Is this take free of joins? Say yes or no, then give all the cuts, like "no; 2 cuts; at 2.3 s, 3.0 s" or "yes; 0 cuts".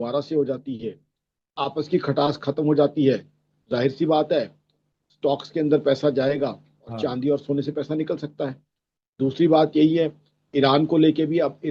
yes; 0 cuts